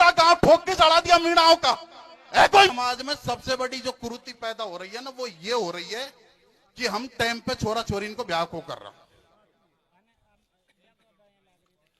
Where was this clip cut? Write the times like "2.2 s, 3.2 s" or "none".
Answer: 2.7 s